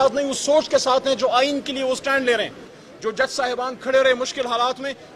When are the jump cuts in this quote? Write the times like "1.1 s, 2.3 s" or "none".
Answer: none